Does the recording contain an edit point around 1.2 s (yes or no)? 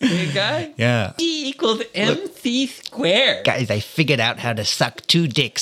yes